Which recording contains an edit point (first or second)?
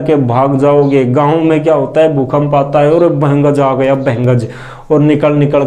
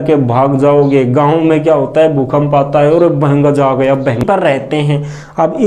second